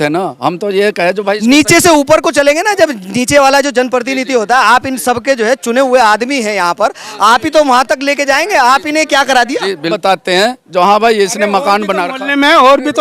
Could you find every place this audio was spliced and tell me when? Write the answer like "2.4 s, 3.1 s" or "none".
9.9 s

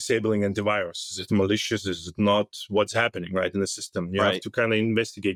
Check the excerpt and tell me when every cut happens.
none

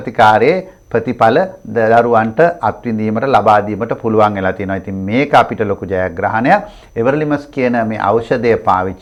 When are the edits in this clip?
none

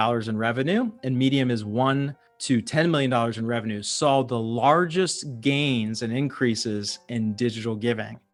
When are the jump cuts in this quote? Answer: none

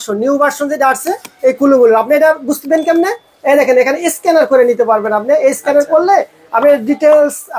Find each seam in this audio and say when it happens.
none

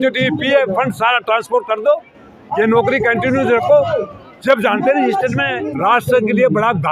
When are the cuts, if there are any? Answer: 5.6 s

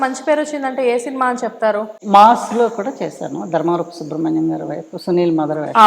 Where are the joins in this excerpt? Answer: 1.9 s

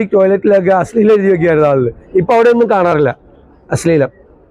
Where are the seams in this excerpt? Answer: none

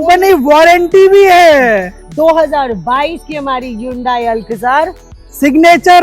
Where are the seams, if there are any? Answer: 2.0 s

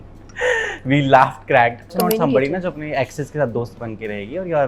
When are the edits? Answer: 1.9 s

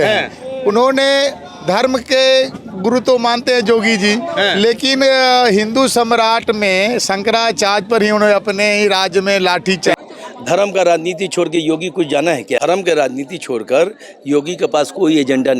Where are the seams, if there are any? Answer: 9.9 s, 12.6 s

